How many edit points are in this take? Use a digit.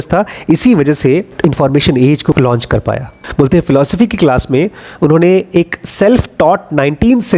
2